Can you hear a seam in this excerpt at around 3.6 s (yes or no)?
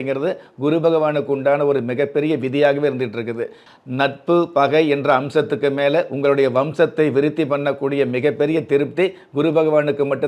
yes